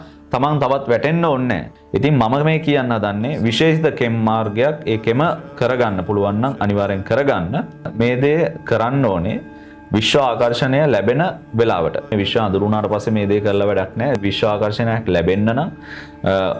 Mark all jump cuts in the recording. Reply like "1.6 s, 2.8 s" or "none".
1.7 s, 12.1 s